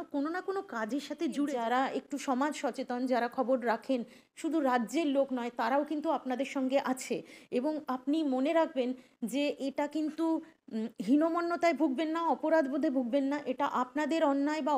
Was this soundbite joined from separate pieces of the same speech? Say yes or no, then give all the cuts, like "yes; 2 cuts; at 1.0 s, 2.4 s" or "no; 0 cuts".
yes; 1 cut; at 1.5 s